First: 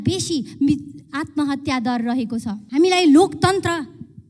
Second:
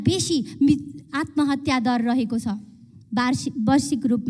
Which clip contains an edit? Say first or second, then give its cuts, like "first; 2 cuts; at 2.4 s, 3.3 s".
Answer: first; 1 cut; at 2.6 s